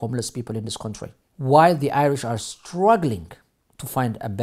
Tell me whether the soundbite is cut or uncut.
cut